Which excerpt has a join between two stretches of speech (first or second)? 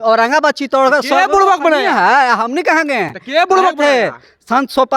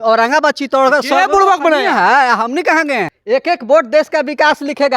second